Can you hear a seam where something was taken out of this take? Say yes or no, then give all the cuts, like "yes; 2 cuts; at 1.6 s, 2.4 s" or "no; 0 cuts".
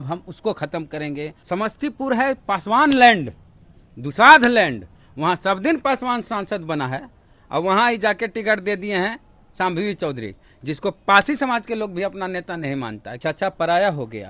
yes; 2 cuts; at 1.3 s, 13.1 s